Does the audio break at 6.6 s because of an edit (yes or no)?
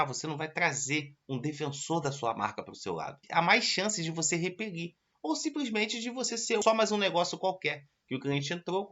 yes